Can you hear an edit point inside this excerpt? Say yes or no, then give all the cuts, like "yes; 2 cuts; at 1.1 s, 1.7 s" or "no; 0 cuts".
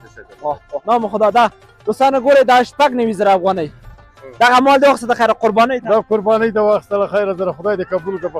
yes; 2 cuts; at 0.8 s, 4.2 s